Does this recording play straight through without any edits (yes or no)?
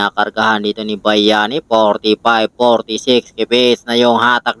yes